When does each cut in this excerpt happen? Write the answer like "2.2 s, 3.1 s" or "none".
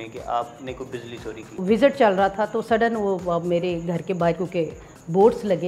1.6 s